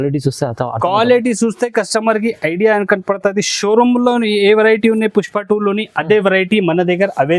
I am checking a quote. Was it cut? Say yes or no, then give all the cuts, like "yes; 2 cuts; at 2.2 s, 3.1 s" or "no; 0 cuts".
no; 0 cuts